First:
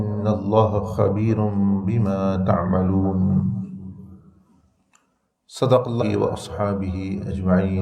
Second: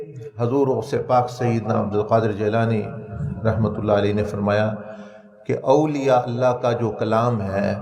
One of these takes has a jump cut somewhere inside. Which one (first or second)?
first